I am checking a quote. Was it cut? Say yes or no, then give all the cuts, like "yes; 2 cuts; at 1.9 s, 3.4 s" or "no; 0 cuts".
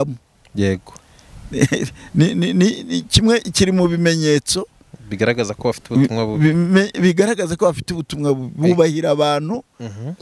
no; 0 cuts